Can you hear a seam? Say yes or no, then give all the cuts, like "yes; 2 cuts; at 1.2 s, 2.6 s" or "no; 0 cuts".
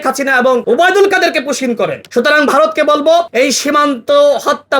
yes; 1 cut; at 2.0 s